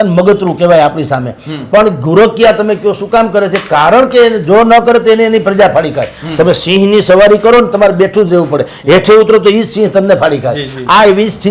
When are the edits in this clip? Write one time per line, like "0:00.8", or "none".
none